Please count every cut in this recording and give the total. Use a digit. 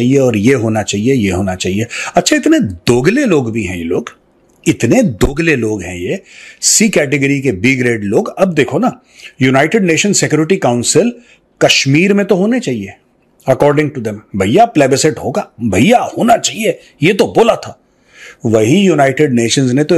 0